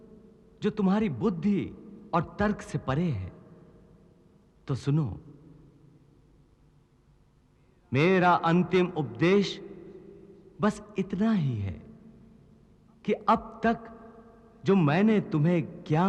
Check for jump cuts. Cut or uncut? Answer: uncut